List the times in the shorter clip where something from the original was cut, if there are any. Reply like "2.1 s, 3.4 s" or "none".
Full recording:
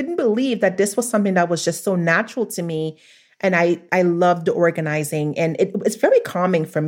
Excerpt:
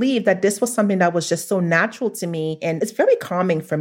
2.7 s